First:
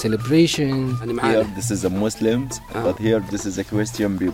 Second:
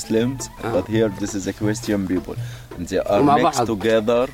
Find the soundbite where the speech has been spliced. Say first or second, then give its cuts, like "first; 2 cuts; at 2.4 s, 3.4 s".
first; 1 cut; at 1.1 s